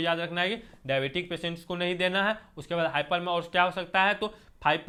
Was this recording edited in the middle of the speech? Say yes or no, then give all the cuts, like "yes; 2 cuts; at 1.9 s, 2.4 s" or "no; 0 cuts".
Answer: no; 0 cuts